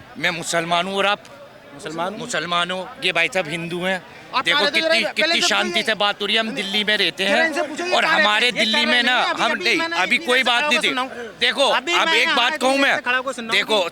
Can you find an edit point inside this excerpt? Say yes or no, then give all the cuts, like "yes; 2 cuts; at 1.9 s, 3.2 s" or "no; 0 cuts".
no; 0 cuts